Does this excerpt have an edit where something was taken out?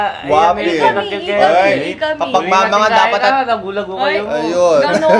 no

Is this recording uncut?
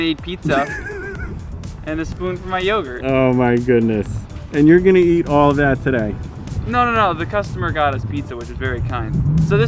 yes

